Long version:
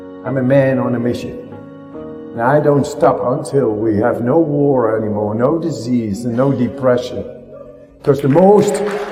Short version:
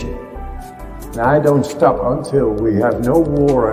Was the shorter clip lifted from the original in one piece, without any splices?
yes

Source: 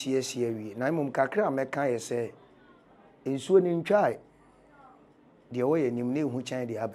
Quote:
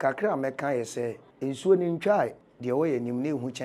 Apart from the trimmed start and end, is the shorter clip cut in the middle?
yes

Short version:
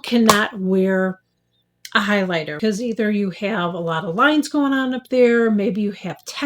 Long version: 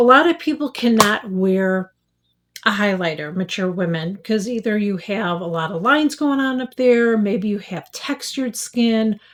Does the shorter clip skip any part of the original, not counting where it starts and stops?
yes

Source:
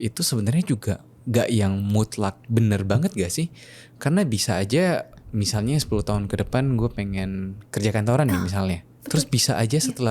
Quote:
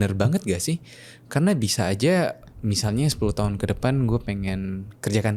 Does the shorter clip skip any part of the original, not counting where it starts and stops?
no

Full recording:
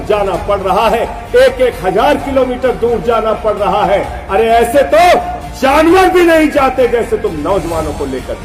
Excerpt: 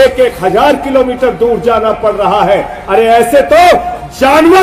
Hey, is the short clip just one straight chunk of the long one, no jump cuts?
yes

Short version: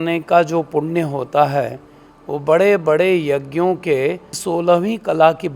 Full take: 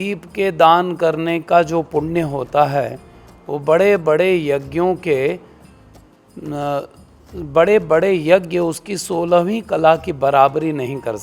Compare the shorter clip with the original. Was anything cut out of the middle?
yes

